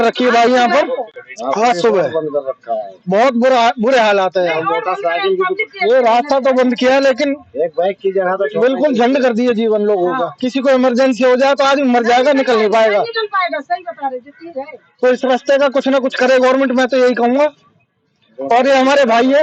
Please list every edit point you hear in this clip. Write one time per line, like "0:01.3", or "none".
none